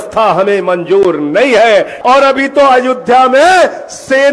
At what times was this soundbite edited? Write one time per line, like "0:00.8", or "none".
0:01.9